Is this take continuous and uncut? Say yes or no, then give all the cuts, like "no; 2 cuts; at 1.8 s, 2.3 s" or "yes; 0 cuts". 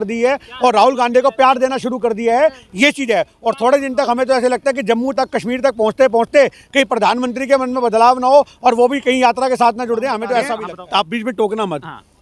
no; 1 cut; at 10.7 s